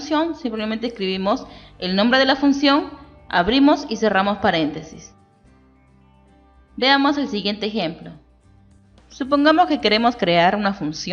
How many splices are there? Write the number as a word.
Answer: zero